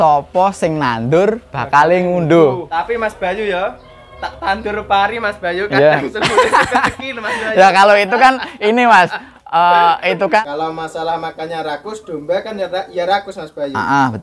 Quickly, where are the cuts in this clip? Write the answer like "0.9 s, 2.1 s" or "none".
2.6 s, 10.4 s